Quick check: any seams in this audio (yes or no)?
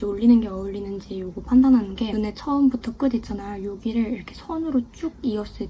no